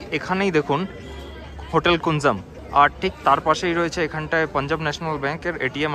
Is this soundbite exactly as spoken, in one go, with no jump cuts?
no; 1 cut; at 2.5 s

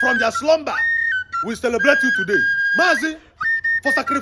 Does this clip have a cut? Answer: yes; 1 cut; at 2.6 s

